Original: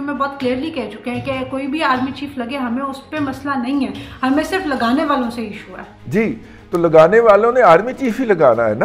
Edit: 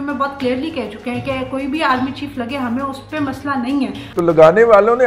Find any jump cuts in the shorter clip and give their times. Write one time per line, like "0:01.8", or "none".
0:04.0